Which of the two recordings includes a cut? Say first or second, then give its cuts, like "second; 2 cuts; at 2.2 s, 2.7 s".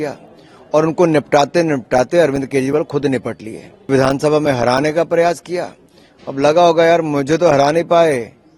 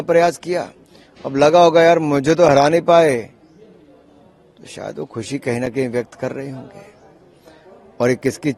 first; 1 cut; at 3.9 s